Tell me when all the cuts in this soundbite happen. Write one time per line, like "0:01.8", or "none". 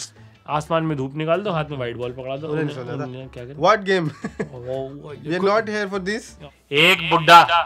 0:06.5